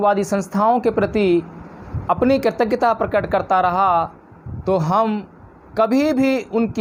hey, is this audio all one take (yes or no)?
yes